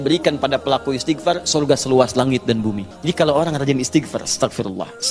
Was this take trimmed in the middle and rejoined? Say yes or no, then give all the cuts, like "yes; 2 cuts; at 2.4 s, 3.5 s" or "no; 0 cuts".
yes; 1 cut; at 2.9 s